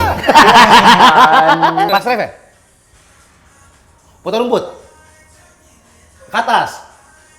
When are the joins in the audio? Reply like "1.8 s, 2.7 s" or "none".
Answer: 1.9 s